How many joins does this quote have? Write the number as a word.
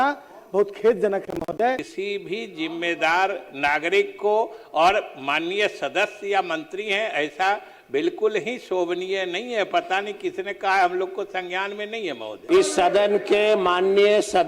two